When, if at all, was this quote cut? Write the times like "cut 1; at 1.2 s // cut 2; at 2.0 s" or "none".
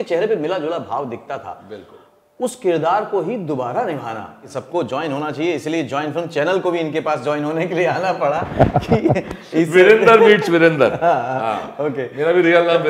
cut 1; at 4.5 s